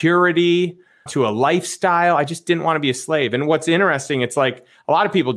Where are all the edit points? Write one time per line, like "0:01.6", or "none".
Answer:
0:01.0